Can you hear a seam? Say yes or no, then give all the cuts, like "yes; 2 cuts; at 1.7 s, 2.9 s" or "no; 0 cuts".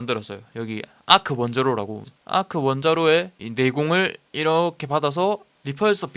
no; 0 cuts